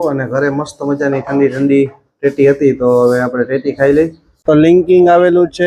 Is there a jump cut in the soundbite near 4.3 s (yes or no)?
yes